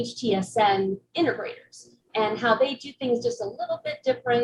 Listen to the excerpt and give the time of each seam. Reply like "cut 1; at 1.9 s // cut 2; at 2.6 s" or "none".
none